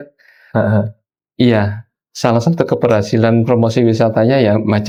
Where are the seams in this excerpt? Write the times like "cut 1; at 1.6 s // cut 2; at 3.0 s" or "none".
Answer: none